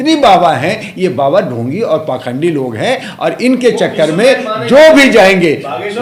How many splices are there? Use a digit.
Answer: 0